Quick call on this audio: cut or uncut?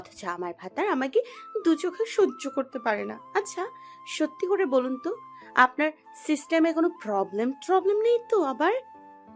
uncut